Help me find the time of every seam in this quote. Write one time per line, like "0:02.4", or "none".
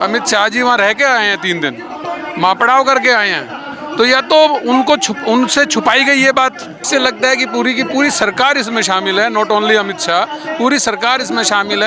0:06.8